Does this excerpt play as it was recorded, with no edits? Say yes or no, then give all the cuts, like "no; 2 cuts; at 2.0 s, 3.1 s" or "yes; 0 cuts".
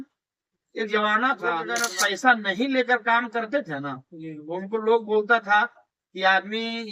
no; 1 cut; at 1.8 s